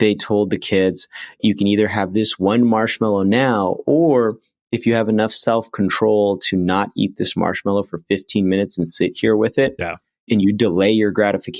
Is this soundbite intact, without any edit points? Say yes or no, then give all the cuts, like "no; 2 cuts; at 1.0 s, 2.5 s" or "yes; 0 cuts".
no; 2 cuts; at 1.4 s, 10.3 s